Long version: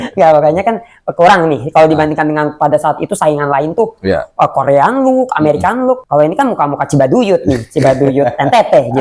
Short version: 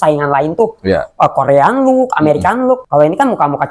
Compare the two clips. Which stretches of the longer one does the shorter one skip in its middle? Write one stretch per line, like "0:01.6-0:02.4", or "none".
none

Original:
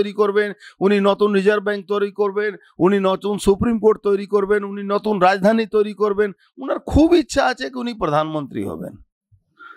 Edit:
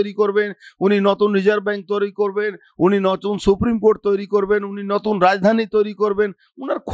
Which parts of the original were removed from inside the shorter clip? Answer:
none

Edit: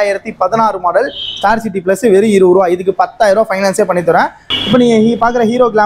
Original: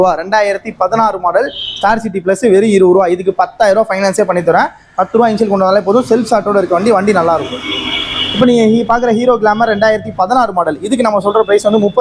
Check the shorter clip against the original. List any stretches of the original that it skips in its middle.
0:04.8-0:08.1

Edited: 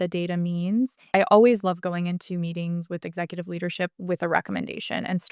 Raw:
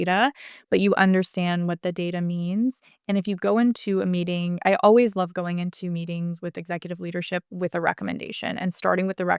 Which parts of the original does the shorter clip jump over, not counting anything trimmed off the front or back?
0:02.9-0:04.6

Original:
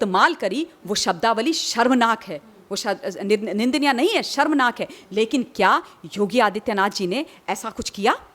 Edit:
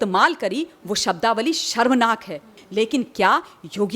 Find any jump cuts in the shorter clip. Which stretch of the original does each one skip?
0:02.5-0:04.9

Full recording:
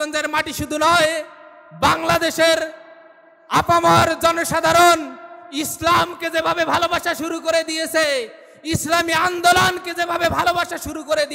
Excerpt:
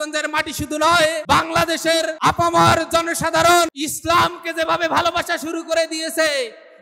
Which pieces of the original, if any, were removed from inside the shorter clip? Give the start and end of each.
0:01.2-0:01.7
0:02.7-0:03.5
0:05.1-0:05.6

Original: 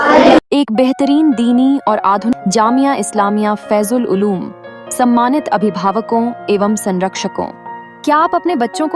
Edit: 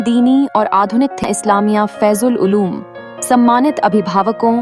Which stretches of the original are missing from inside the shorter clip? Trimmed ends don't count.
0:02.6-0:02.9

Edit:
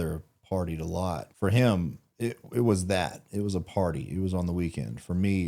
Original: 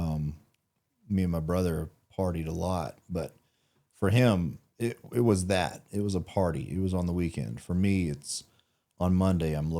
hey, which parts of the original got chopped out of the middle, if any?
0:02.9-0:03.9

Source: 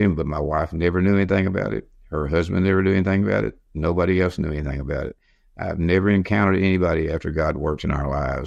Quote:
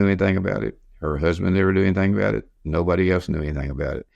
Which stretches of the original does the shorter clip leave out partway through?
none

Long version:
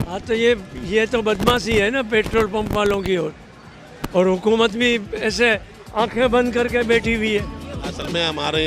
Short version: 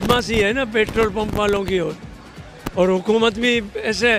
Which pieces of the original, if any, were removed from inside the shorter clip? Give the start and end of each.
none

